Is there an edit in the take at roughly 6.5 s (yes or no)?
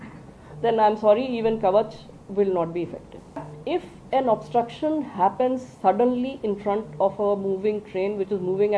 no